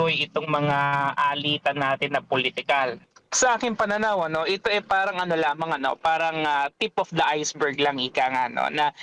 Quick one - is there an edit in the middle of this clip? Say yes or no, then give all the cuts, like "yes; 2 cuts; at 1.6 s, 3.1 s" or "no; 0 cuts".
yes; 1 cut; at 3.0 s